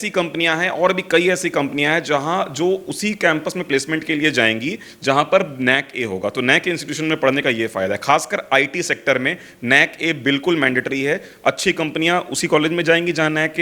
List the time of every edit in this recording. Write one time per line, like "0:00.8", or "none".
none